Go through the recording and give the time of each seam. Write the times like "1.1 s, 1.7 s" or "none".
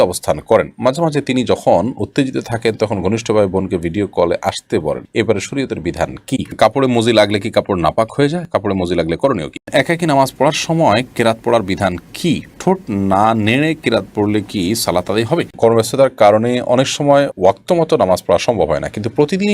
6.5 s, 9.6 s, 15.5 s

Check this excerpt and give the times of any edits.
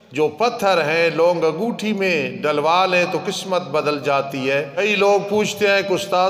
4.8 s

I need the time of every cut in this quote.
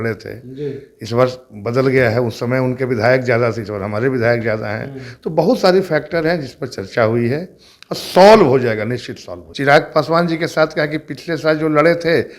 9.4 s

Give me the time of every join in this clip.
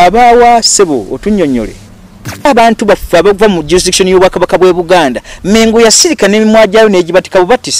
2.5 s

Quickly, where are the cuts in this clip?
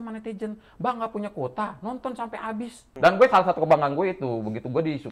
2.8 s

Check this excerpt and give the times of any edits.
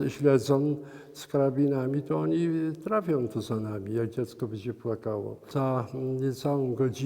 5.5 s

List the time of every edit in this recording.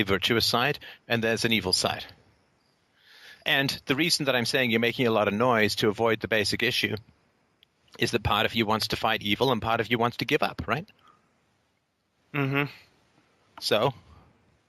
4.6 s

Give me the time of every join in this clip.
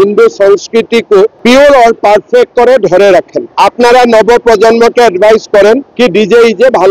1.4 s, 3.4 s, 5.9 s

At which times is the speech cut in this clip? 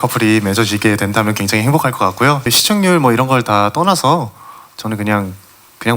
2.5 s

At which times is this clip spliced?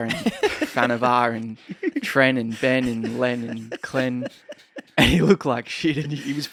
none

